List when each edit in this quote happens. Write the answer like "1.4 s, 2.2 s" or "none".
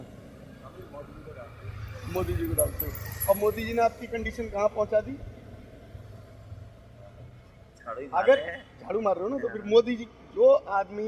none

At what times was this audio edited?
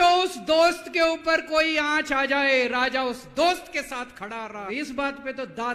4.7 s

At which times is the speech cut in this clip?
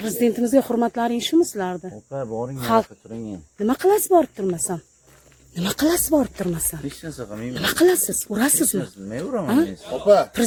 none

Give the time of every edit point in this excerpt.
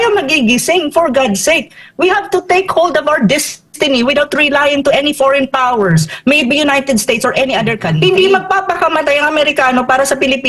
7.9 s

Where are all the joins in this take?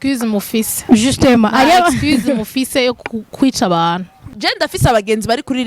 4.4 s

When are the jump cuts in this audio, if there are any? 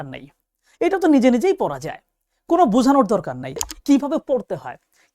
3.7 s

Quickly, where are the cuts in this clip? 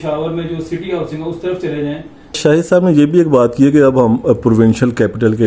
2.4 s

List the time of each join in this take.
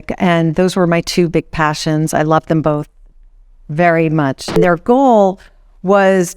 4.6 s

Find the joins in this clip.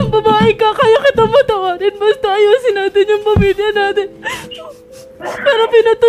none

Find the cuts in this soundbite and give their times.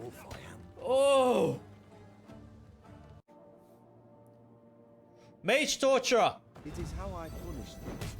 3.3 s

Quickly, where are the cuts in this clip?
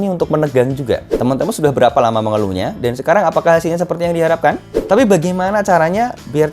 1.1 s, 4.7 s

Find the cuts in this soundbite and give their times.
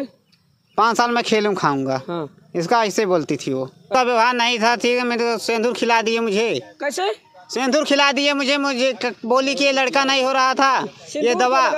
3.9 s

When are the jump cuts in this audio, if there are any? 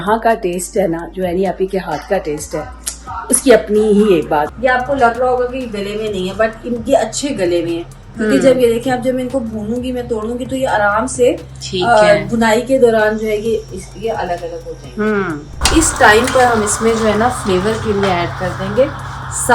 4.5 s, 15.5 s

